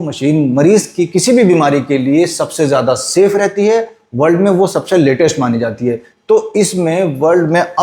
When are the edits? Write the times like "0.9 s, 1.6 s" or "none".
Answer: none